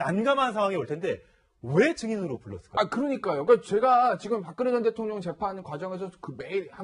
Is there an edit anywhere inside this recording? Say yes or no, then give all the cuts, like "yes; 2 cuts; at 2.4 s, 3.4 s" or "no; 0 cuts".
yes; 1 cut; at 3.4 s